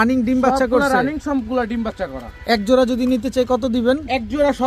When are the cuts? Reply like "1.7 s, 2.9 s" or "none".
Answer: none